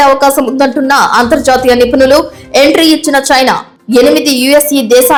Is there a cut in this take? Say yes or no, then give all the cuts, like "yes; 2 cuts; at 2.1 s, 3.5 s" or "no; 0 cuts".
no; 0 cuts